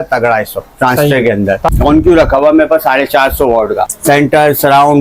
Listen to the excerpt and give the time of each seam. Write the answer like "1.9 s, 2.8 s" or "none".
1.7 s, 3.9 s